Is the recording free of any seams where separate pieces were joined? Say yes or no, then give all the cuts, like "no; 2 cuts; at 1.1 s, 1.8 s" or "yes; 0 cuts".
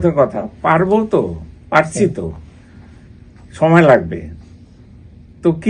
yes; 0 cuts